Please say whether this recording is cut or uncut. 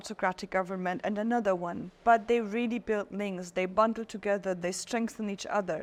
uncut